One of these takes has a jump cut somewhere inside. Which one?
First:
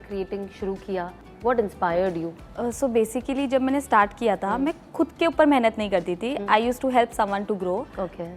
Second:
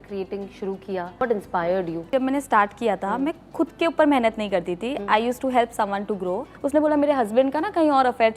second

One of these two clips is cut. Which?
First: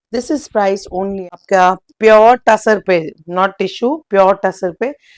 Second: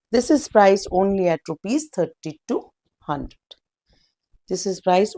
first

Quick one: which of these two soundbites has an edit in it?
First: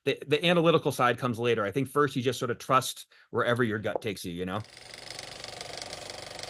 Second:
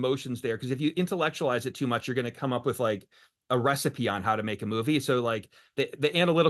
first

